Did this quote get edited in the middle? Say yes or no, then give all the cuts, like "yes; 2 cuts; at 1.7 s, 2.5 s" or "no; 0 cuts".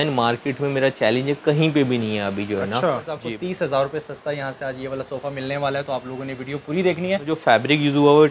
yes; 2 cuts; at 3.2 s, 7.4 s